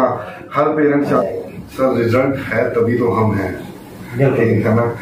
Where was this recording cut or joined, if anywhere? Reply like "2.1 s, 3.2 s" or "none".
1.2 s